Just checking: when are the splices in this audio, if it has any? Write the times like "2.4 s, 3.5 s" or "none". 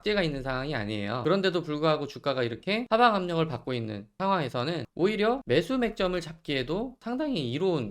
1.2 s, 2.8 s, 4.0 s, 4.9 s, 5.4 s, 7.0 s